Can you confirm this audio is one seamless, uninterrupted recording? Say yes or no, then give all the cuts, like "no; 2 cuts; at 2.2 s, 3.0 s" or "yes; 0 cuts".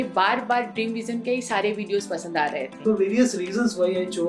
no; 1 cut; at 2.8 s